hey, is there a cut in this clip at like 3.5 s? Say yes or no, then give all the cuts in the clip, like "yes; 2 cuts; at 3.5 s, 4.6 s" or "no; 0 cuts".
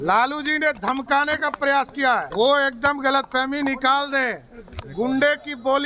no; 1 cut; at 2.3 s